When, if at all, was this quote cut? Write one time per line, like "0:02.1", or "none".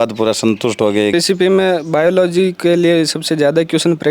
0:01.1